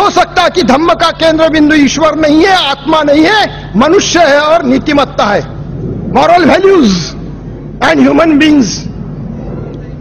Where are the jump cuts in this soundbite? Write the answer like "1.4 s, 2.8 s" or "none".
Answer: 4.3 s